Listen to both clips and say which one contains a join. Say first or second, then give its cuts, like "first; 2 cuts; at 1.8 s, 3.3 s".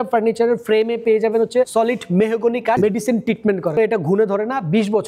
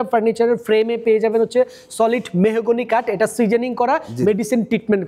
first; 3 cuts; at 1.7 s, 2.8 s, 3.7 s